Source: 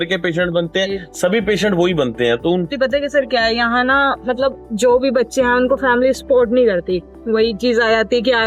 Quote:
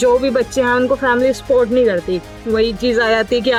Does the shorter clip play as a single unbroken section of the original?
yes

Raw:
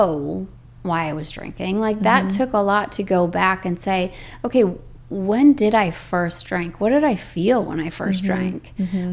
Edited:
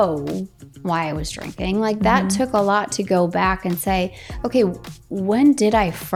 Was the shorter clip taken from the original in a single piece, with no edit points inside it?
yes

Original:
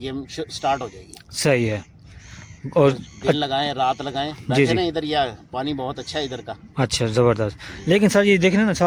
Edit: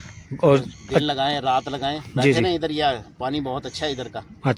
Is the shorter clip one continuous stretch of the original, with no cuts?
yes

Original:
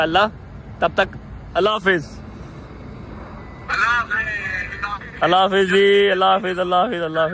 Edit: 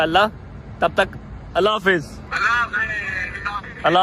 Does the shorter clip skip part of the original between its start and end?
yes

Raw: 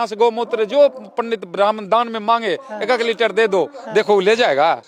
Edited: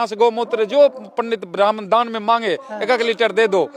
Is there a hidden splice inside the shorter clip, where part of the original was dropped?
no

